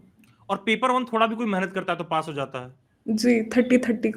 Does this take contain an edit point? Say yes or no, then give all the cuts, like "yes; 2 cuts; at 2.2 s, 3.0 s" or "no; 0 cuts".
no; 0 cuts